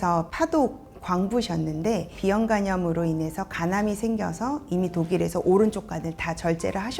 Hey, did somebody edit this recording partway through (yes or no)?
yes